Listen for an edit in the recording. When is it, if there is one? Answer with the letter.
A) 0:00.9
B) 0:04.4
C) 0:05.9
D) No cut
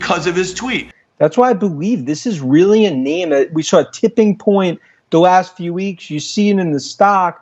A